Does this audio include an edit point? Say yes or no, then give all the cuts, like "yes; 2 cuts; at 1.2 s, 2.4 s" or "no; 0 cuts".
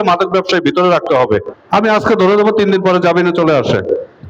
yes; 1 cut; at 1.6 s